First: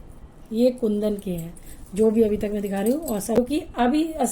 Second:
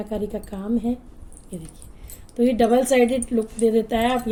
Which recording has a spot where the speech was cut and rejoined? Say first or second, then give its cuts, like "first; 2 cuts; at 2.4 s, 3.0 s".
first; 1 cut; at 3.4 s